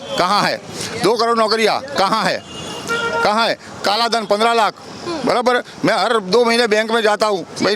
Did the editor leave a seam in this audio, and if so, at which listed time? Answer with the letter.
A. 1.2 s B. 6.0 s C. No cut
C